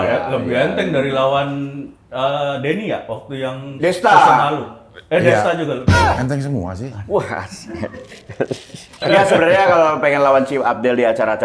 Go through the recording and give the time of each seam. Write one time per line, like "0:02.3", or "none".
0:09.0